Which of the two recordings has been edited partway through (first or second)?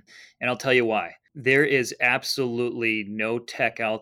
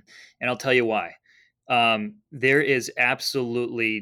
first